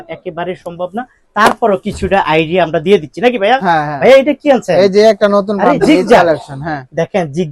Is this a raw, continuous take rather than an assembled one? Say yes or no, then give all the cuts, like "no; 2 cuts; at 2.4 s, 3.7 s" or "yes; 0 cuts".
yes; 0 cuts